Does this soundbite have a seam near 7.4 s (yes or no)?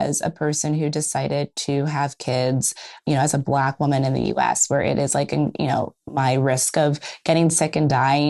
no